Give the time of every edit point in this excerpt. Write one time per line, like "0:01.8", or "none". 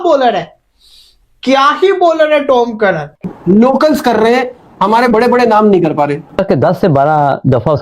0:03.3
0:06.4